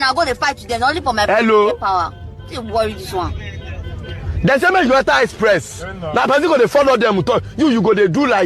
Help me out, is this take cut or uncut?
cut